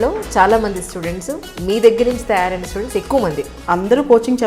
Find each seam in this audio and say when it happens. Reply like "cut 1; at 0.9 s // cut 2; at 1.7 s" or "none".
cut 1; at 3.6 s